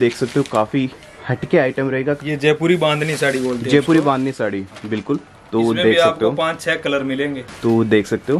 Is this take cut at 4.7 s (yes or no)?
no